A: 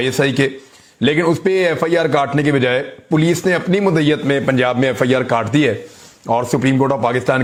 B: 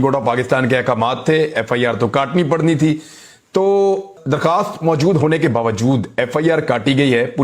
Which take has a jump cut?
B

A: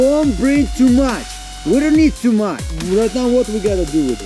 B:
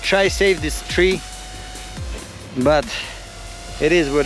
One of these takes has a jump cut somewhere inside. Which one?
A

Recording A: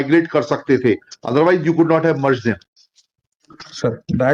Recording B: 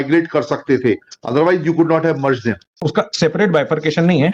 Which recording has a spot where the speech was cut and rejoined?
B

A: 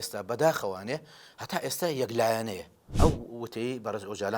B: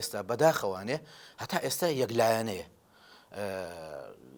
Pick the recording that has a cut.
A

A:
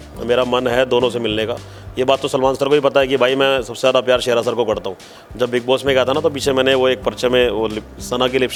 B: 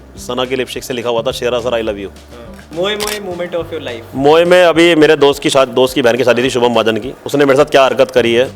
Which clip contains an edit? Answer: B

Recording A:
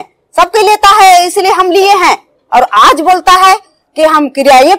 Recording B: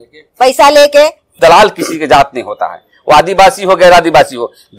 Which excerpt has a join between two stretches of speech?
B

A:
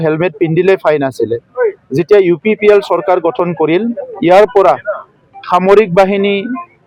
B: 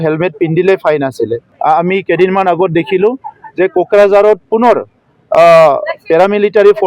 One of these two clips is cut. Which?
B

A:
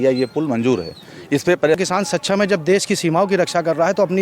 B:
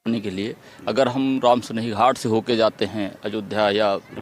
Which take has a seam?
A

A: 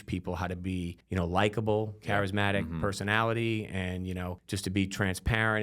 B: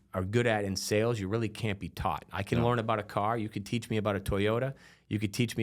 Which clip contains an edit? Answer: A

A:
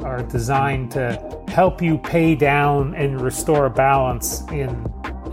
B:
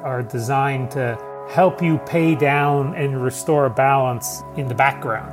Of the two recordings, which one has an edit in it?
B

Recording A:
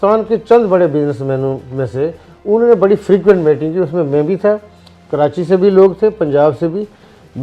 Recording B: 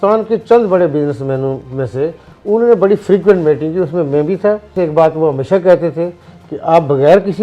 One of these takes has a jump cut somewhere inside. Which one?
B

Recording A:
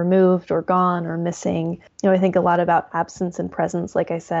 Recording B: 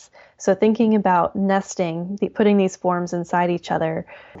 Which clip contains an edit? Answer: A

